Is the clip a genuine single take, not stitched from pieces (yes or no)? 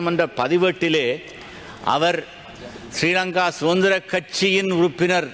yes